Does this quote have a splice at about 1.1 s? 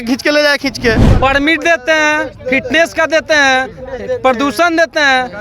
yes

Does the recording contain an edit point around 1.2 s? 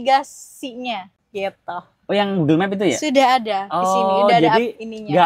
yes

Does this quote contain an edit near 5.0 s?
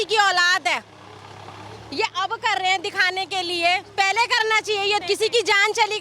yes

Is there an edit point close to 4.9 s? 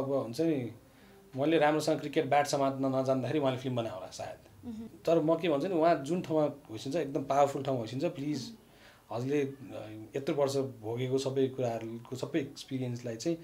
yes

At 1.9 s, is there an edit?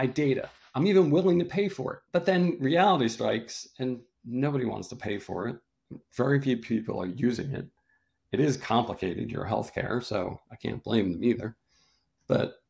yes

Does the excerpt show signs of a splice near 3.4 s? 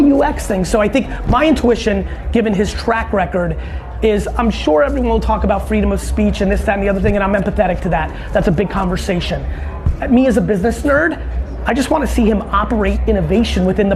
no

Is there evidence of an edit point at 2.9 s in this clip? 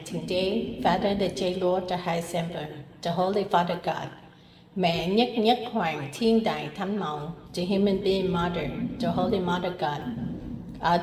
no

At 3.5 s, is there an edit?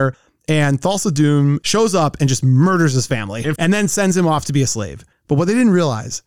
yes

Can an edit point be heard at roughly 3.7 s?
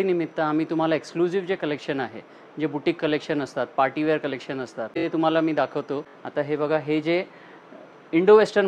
no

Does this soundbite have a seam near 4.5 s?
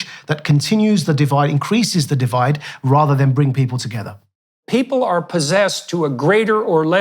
yes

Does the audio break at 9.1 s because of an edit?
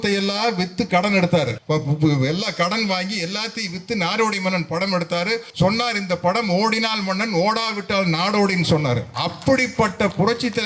yes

